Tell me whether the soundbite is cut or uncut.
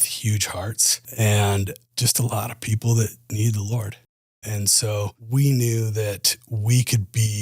cut